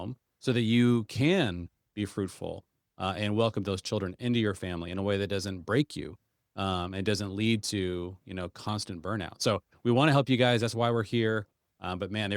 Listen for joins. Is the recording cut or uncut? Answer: uncut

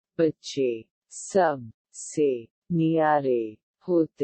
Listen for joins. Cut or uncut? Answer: uncut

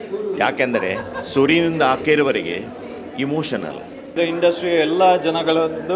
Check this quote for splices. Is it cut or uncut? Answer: cut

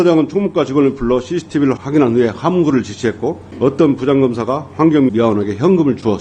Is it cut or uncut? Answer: cut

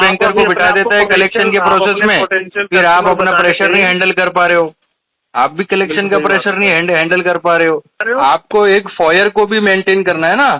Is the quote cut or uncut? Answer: cut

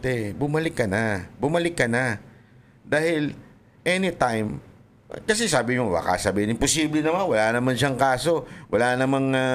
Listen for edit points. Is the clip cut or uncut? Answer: uncut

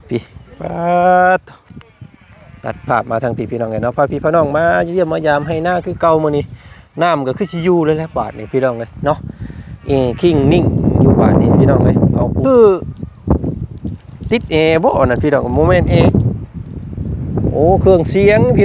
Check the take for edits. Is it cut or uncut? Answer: cut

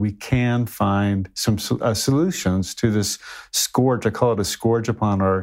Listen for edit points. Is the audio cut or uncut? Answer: uncut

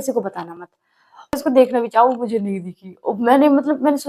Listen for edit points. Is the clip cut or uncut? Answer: cut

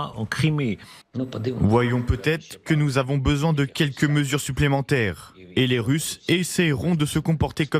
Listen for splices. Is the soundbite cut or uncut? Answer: cut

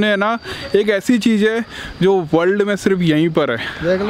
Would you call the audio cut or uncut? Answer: uncut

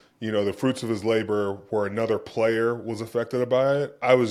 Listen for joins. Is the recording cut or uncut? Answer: uncut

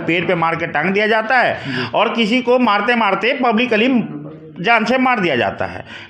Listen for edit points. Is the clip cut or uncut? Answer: uncut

